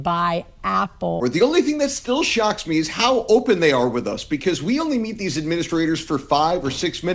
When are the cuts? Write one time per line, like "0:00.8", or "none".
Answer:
0:01.2